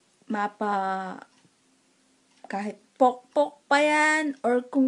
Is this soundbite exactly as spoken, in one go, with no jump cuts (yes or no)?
yes